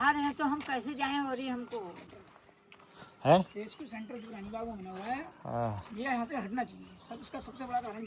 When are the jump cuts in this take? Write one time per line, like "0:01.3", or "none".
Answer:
0:02.1